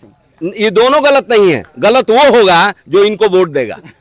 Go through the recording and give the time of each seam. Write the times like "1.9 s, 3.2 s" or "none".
none